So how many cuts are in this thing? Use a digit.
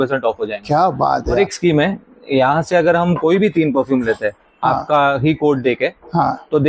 1